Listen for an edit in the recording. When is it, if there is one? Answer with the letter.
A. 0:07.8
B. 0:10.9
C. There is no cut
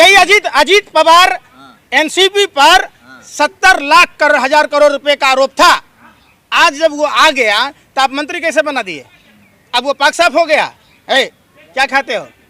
C